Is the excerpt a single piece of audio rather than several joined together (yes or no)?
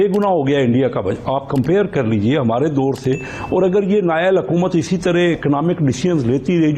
yes